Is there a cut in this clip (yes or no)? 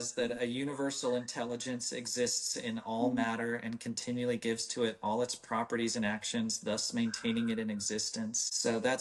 no